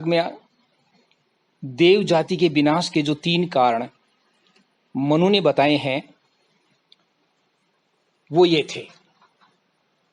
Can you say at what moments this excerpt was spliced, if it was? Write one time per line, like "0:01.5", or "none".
0:02.0